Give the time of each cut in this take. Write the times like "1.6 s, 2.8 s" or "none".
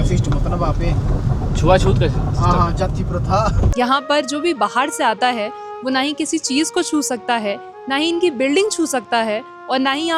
3.6 s

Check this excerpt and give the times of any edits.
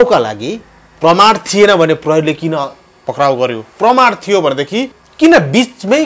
5.0 s

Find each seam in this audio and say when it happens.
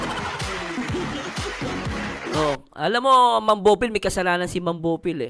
1.6 s

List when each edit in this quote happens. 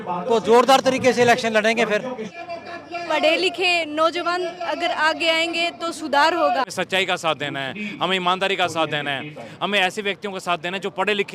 2.4 s, 6.7 s

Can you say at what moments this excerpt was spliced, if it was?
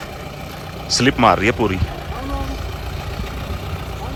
none

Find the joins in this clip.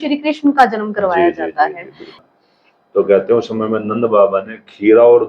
2.2 s

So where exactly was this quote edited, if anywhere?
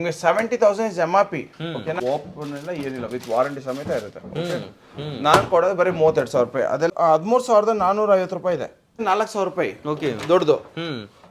2.0 s, 6.9 s, 9.0 s

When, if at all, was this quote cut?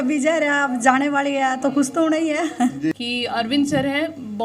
2.9 s

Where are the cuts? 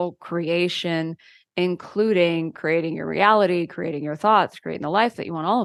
none

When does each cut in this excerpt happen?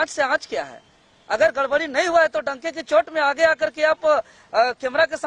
none

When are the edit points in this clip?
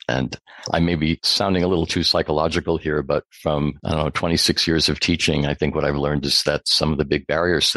1.3 s, 3.8 s

